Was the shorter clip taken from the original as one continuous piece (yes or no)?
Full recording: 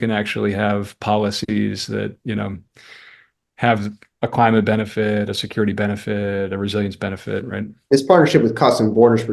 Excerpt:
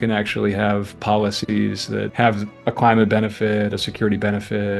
no